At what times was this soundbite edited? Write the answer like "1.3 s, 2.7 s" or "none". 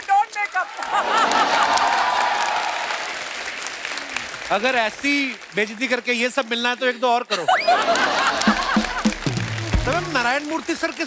9.8 s